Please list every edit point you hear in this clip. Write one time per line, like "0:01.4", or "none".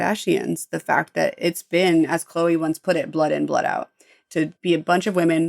0:04.2